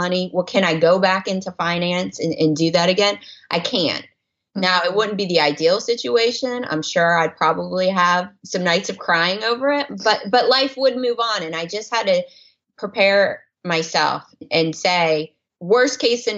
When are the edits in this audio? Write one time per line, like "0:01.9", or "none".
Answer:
0:14.5